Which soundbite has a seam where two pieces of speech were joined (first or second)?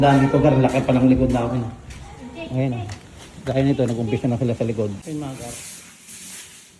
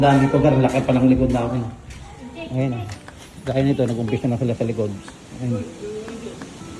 first